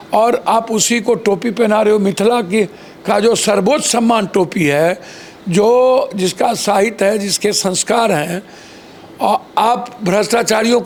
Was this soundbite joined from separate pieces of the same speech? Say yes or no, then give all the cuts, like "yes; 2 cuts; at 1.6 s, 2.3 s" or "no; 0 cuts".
no; 0 cuts